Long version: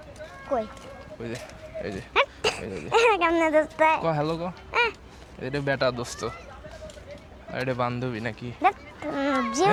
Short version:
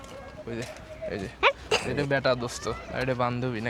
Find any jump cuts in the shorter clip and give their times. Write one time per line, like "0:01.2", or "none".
0:01.9
0:02.8

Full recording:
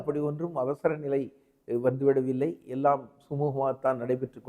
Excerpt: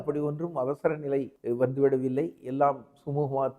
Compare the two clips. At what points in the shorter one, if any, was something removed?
0:01.3

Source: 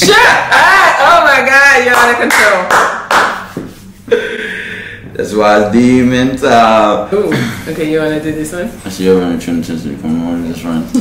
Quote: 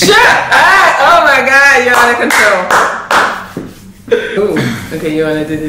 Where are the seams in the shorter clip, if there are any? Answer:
0:04.3

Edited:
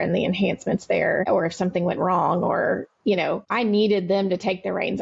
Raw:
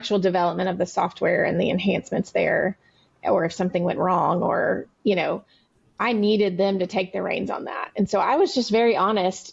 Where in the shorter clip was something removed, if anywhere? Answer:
0:01.2
0:03.4

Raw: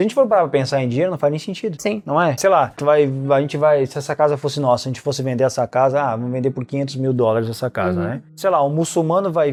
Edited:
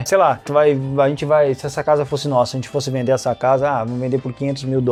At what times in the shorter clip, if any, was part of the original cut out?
none

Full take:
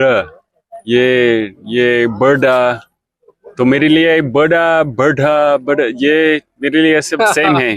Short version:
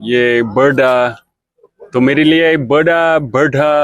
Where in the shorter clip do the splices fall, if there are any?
none

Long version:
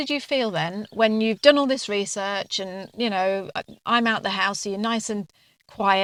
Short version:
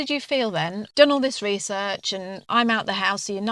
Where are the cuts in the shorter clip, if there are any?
0:00.9
0:02.4

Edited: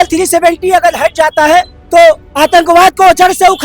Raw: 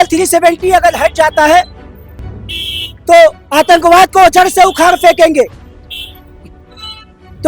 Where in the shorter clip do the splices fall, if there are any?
0:01.8

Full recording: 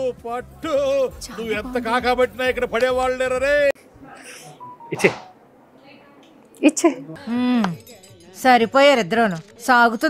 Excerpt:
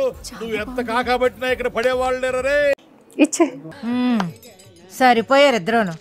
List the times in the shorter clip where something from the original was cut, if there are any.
0:03.0

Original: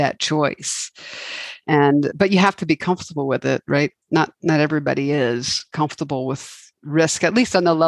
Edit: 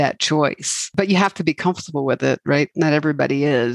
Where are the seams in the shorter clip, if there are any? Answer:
0:00.9
0:02.7

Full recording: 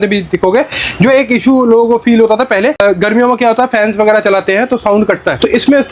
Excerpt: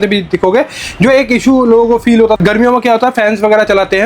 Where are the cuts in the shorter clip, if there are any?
0:02.4

